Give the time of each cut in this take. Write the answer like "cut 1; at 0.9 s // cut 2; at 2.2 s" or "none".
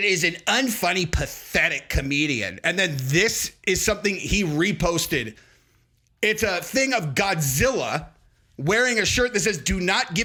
none

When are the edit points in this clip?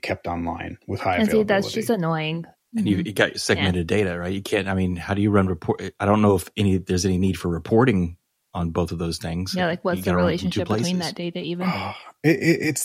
cut 1; at 2.5 s

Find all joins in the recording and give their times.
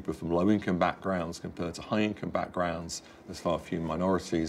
none

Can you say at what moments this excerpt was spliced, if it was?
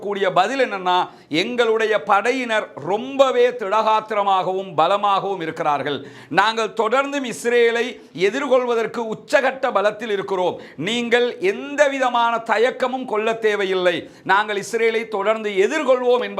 none

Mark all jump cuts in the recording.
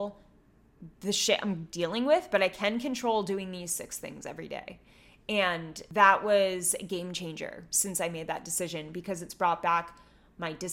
cut 1; at 5.8 s

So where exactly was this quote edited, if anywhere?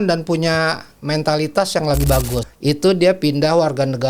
cut 1; at 2.4 s

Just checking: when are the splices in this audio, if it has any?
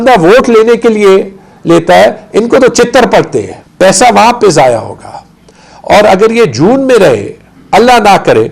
cut 1; at 3.6 s

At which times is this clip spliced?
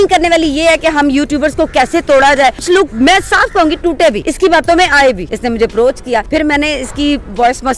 cut 1; at 2.7 s // cut 2; at 4.3 s // cut 3; at 5.3 s // cut 4; at 6.3 s

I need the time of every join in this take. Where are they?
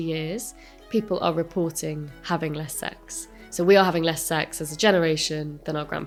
none

